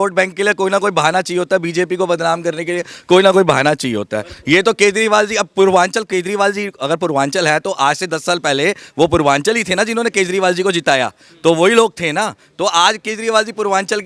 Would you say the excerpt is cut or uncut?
uncut